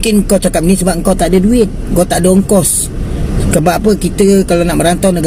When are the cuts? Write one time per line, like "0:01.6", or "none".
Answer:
none